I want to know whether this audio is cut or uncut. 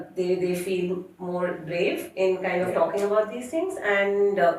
uncut